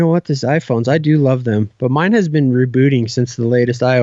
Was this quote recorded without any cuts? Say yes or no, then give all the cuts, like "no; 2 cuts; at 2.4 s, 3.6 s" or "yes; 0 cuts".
yes; 0 cuts